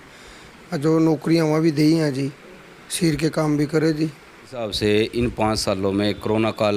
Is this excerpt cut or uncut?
cut